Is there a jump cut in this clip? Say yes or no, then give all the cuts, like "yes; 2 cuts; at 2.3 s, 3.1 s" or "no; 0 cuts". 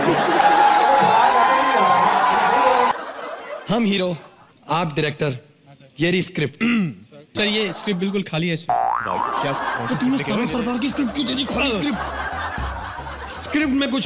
yes; 1 cut; at 2.9 s